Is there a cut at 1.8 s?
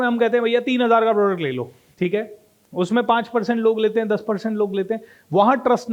yes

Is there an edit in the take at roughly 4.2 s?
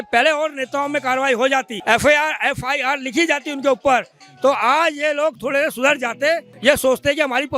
no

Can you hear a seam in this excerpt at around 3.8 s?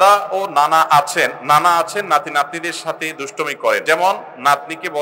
yes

